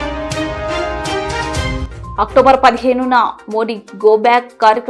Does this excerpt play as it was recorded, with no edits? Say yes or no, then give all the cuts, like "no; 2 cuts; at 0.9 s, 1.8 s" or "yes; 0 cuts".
no; 1 cut; at 1.8 s